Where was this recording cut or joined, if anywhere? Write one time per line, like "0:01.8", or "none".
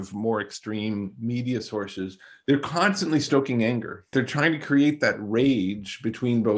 0:04.1